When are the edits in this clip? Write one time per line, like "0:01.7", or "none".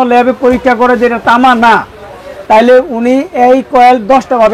none